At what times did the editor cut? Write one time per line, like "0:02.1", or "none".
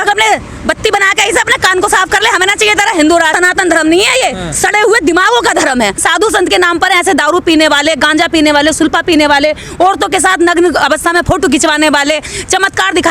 0:03.3
0:06.0